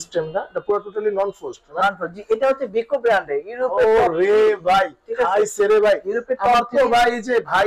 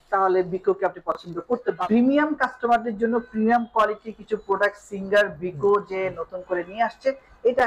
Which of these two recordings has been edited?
second; 1 cut; at 1.8 s

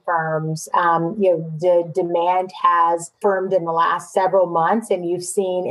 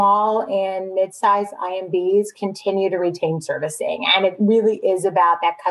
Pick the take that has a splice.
first; 2 cuts; at 3.1 s, 4.1 s

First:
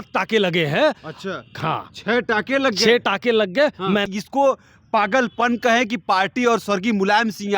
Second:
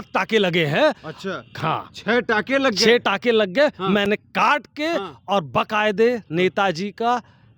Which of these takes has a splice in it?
first; 1 cut; at 4.0 s

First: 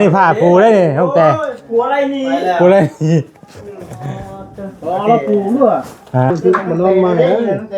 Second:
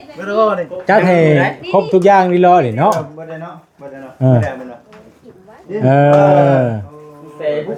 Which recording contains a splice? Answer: first; 1 cut; at 6.3 s

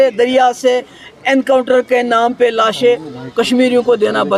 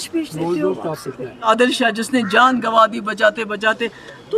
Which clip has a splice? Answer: second; 1 cut; at 1.5 s

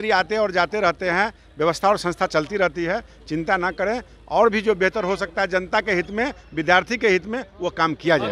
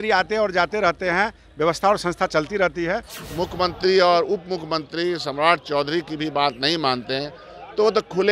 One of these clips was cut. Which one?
second; 1 cut; at 3.1 s

